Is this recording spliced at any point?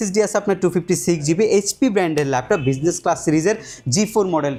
no; 0 cuts

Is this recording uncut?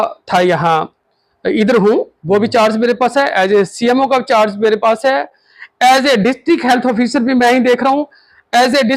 yes; 0 cuts

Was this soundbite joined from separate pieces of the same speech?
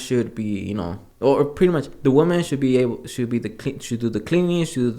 yes; 1 cut; at 1.0 s

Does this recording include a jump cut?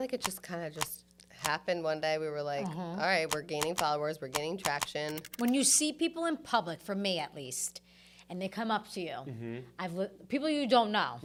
no; 0 cuts

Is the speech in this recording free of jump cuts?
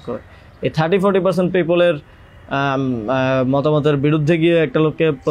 yes; 0 cuts

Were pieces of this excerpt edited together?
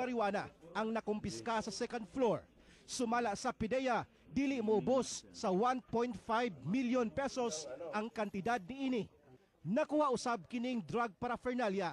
no; 0 cuts

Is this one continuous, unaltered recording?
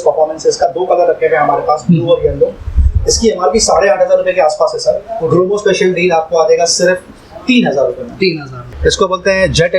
no; 1 cut; at 8.7 s

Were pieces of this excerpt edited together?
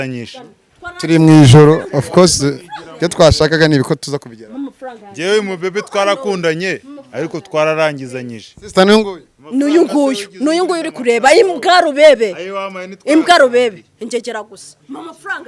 no; 0 cuts

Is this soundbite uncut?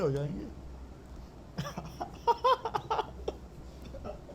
yes; 0 cuts

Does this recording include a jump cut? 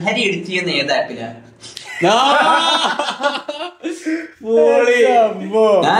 no; 0 cuts

